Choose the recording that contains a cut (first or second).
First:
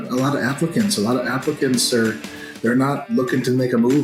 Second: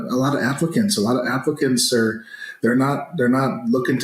first